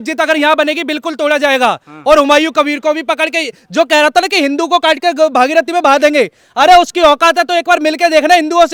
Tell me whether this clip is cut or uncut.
uncut